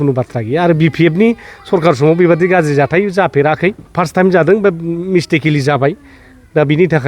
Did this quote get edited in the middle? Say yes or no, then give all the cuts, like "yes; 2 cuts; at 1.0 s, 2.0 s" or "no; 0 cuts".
yes; 1 cut; at 3.8 s